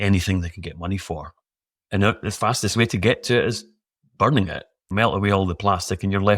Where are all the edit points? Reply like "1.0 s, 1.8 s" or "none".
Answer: none